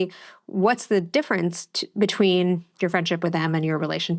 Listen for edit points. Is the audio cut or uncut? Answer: uncut